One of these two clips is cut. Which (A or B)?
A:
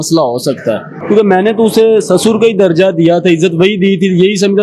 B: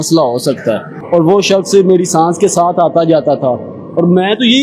B